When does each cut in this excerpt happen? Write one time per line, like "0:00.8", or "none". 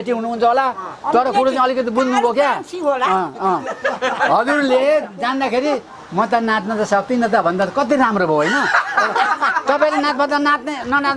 none